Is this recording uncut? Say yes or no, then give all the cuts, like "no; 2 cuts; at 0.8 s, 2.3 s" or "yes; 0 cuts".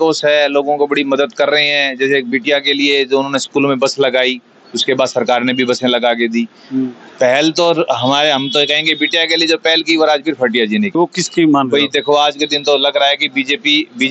no; 1 cut; at 11.0 s